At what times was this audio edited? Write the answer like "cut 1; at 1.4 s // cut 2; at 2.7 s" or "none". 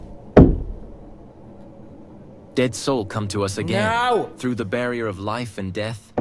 none